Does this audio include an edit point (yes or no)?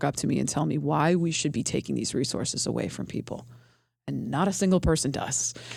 no